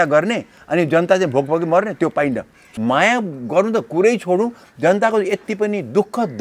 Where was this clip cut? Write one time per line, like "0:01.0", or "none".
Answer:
0:02.6